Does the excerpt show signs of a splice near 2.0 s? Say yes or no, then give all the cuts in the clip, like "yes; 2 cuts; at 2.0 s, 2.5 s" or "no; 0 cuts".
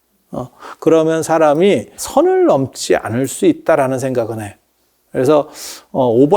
yes; 1 cut; at 2.0 s